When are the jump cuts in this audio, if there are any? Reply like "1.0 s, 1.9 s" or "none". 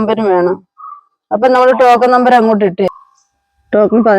2.9 s